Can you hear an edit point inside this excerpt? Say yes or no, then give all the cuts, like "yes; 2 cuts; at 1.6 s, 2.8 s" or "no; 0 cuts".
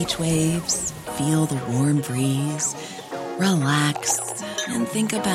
no; 0 cuts